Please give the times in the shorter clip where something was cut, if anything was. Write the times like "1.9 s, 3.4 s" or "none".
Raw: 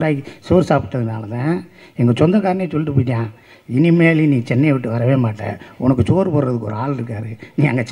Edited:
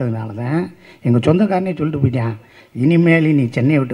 none